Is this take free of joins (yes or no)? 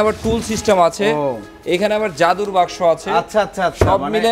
yes